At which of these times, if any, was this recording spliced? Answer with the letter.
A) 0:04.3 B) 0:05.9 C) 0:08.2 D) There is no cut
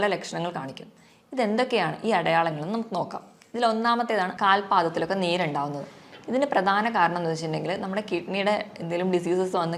A